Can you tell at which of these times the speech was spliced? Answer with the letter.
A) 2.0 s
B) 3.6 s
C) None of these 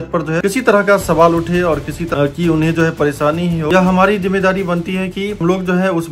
B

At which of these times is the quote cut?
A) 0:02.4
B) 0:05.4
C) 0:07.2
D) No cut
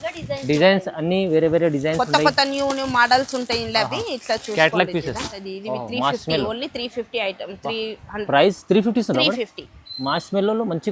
B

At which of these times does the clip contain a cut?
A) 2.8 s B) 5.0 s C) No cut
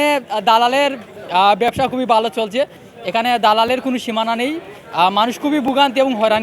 A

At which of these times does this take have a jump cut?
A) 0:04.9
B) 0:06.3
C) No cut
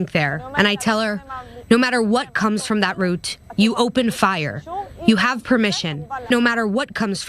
B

